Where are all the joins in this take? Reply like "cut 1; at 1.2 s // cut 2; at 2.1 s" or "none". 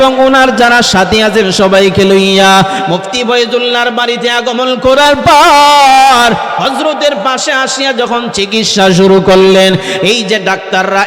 none